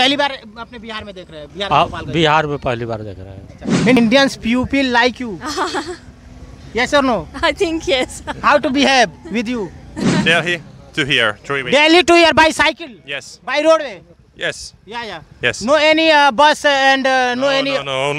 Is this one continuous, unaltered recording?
no; 2 cuts; at 4.0 s, 10.2 s

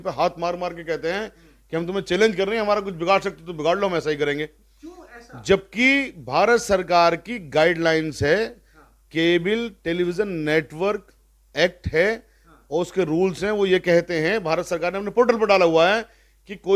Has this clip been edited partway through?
no; 0 cuts

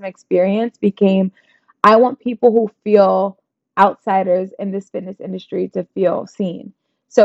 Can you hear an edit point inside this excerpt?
no; 0 cuts

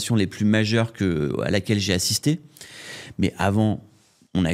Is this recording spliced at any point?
no; 0 cuts

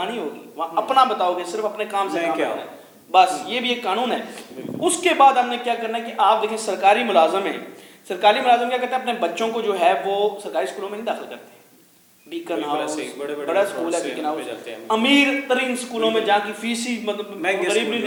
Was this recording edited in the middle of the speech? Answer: no; 0 cuts

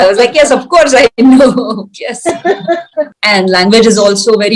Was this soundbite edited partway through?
yes; 1 cut; at 3.1 s

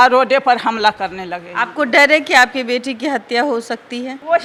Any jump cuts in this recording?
no; 0 cuts

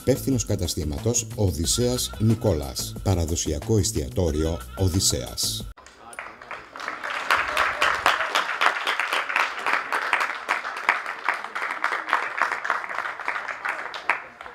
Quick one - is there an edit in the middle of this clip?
no; 0 cuts

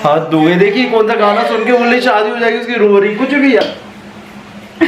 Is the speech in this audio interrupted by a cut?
yes; 1 cut; at 3.6 s

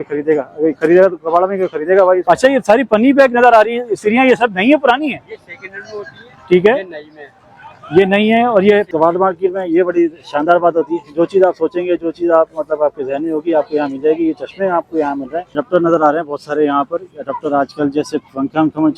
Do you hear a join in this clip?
yes; 3 cuts; at 2.2 s, 8.9 s, 15.5 s

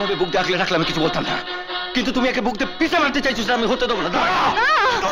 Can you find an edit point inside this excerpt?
yes; 1 cut; at 4.2 s

